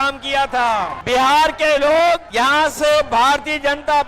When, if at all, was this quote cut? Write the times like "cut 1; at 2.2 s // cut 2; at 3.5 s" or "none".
cut 1; at 1.0 s // cut 2; at 2.3 s

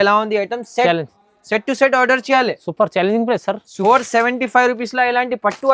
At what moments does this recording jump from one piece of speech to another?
cut 1; at 3.7 s

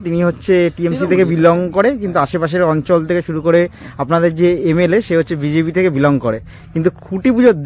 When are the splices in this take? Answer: none

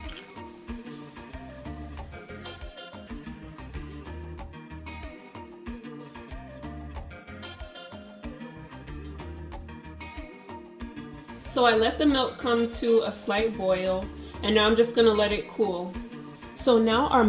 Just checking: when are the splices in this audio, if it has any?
cut 1; at 12.6 s

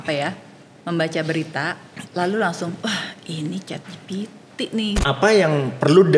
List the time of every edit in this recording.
cut 1; at 5.0 s

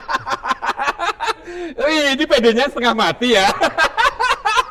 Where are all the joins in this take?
none

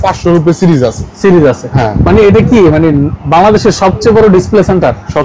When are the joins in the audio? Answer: none

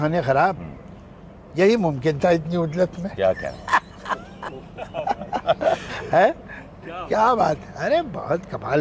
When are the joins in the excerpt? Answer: none

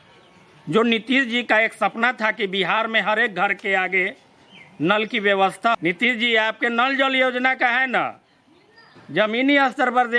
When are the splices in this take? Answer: cut 1; at 5.7 s

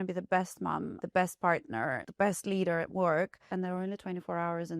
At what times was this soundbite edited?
cut 1; at 1.0 s // cut 2; at 2.0 s // cut 3; at 3.4 s

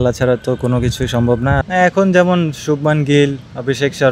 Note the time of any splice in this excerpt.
cut 1; at 1.6 s

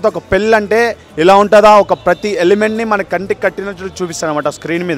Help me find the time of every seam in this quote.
none

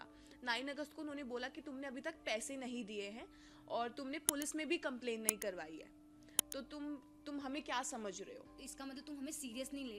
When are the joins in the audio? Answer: cut 1; at 8.5 s

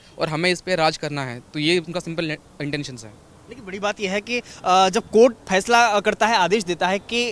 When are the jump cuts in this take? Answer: none

